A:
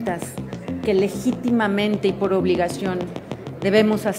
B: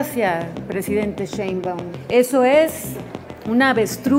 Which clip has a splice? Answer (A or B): B